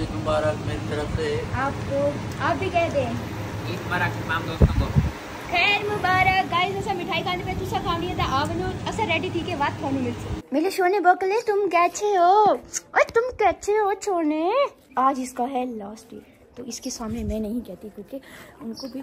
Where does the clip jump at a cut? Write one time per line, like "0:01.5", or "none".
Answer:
0:10.3
0:14.8